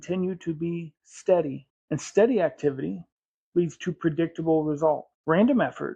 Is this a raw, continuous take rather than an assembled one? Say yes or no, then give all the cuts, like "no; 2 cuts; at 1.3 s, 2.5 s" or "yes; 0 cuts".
no; 2 cuts; at 1.7 s, 5.1 s